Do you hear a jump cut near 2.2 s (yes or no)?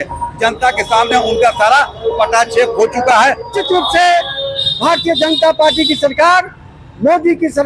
no